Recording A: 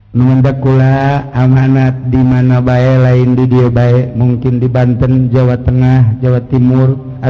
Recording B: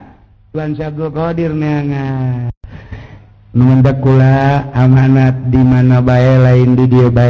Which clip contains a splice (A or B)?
B